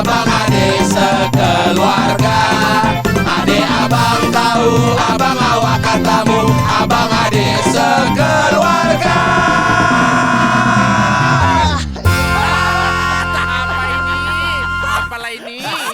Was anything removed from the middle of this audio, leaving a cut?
no; 0 cuts

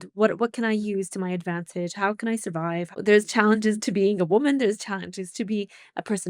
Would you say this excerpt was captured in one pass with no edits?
no; 1 cut; at 2.9 s

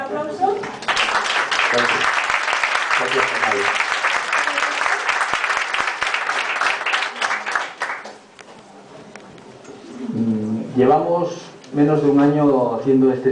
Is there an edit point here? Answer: no; 0 cuts

